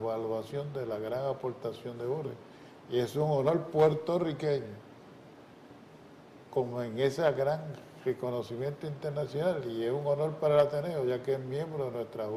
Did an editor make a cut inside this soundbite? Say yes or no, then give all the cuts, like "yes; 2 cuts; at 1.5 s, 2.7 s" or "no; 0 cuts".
no; 0 cuts